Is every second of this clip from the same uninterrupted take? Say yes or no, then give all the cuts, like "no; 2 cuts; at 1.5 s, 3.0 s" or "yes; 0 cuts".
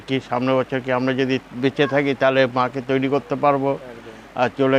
yes; 0 cuts